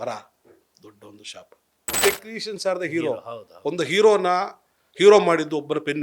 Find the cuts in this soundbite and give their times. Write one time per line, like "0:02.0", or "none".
0:01.8